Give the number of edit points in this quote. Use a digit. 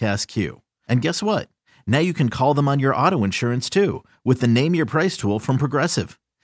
0